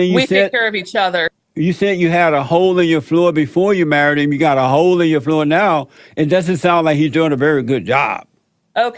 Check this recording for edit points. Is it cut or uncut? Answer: cut